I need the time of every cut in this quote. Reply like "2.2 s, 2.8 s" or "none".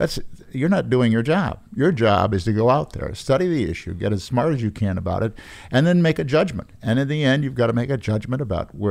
none

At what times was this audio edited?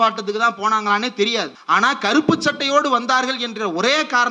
1.6 s

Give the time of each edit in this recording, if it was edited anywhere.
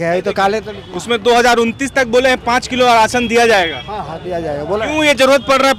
none

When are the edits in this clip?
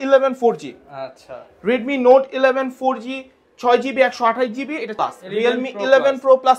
4.9 s

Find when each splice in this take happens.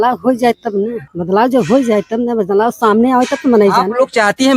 1.1 s

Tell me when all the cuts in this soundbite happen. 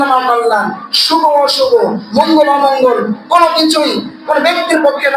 none

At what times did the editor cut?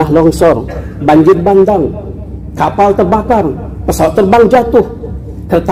none

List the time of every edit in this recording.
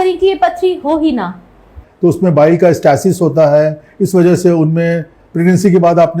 1.8 s

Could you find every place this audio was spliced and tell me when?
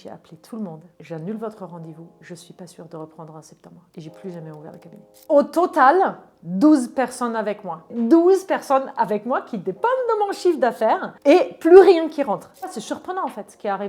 0.9 s, 5.1 s, 7.9 s, 12.7 s

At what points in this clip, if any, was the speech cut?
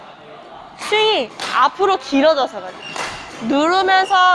none

